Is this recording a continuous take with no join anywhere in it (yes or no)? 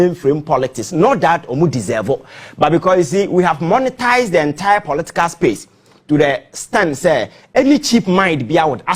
yes